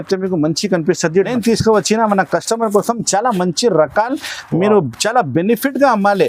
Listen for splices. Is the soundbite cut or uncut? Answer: cut